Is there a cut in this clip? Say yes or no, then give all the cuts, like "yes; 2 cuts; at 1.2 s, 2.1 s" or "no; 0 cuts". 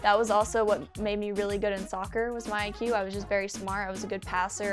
yes; 1 cut; at 0.9 s